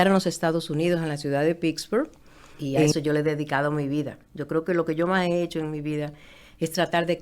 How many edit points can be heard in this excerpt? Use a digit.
1